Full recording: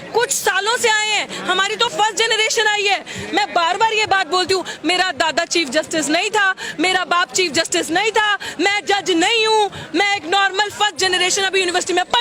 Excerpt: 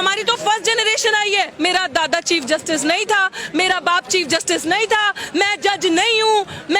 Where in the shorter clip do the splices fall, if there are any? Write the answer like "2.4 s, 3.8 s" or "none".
1.5 s